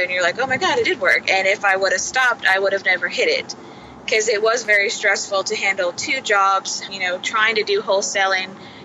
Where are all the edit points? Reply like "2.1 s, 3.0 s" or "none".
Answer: 6.9 s